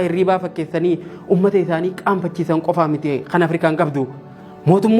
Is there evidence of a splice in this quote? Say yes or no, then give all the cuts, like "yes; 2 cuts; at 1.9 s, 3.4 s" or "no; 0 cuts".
no; 0 cuts